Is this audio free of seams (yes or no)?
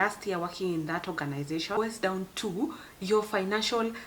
no